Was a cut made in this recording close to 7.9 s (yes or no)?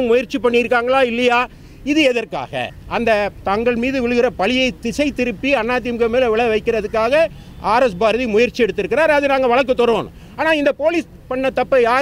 no